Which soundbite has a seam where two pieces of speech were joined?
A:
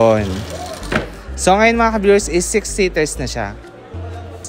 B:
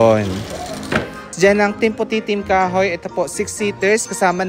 B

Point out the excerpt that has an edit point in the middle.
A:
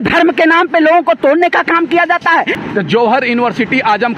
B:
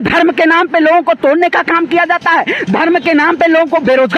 A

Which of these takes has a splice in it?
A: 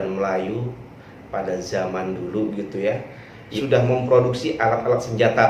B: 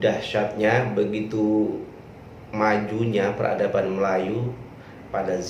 A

